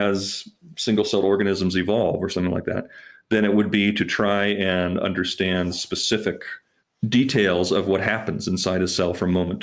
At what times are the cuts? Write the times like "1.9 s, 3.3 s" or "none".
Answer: none